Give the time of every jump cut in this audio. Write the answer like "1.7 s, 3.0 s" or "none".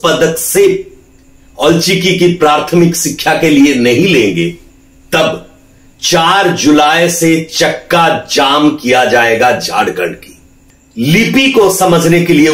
10.5 s